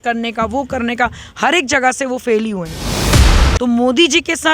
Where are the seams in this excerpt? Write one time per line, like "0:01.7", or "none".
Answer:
0:03.1